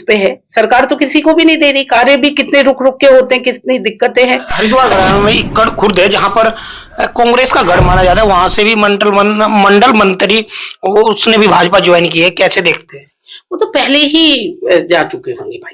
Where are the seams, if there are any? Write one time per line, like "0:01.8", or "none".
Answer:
0:04.5

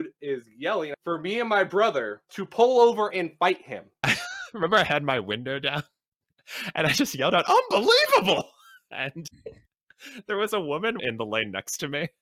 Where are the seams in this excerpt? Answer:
0:00.9
0:04.1
0:11.0

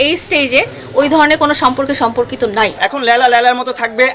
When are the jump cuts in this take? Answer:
0:02.8

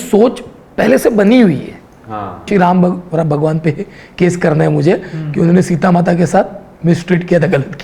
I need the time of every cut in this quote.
0:02.5

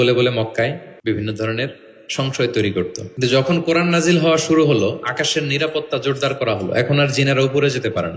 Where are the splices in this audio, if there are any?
0:00.9
0:03.0

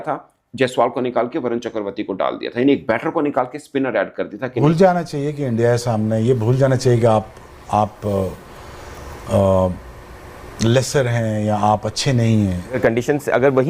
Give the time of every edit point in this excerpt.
0:04.5
0:12.6

